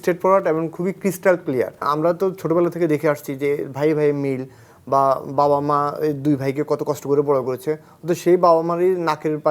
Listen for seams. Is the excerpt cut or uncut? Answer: cut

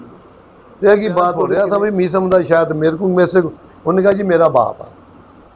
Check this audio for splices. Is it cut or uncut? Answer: cut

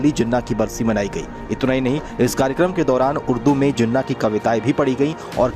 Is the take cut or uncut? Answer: uncut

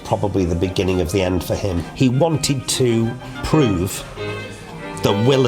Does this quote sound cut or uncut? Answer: cut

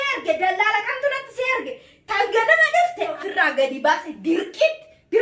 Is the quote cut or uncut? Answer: cut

